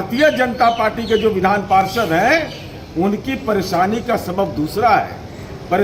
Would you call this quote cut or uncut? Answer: uncut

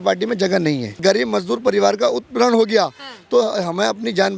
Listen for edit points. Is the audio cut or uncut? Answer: cut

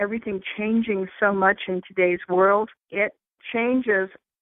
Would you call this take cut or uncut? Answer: cut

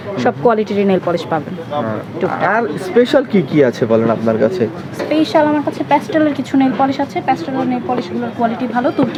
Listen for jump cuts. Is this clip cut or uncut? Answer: uncut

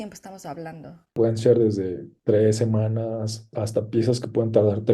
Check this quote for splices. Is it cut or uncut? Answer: cut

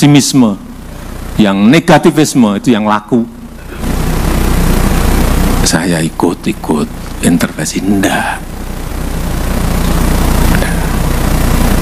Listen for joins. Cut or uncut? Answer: cut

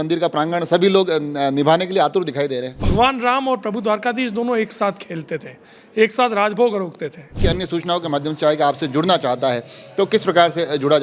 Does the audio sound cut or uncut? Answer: cut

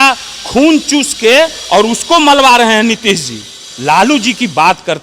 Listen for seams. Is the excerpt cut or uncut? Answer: uncut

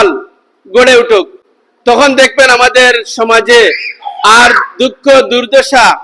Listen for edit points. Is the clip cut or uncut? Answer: uncut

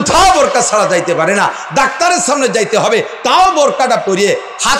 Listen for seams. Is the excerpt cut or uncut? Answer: uncut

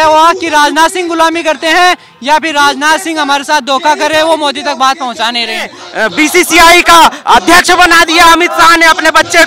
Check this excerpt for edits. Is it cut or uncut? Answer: cut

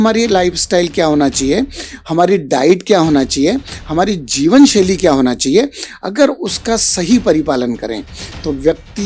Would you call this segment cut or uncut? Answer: uncut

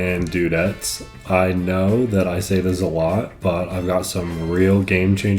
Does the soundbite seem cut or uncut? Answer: uncut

